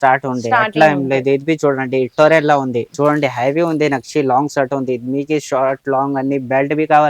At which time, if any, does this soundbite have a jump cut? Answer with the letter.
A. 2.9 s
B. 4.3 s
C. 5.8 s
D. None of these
A